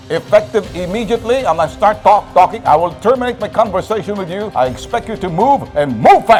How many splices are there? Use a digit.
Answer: 0